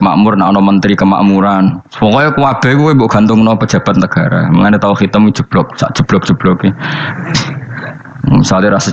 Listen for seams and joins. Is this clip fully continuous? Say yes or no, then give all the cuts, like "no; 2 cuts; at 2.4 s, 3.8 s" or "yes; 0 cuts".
no; 1 cut; at 8.0 s